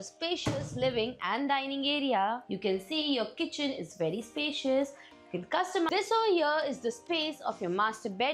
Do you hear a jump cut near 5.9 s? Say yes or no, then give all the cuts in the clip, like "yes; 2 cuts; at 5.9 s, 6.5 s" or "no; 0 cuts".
yes; 2 cuts; at 2.5 s, 5.9 s